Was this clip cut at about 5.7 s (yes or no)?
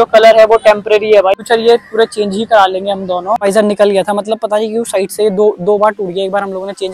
no